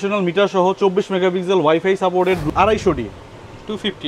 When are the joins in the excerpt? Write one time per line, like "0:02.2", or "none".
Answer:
0:02.4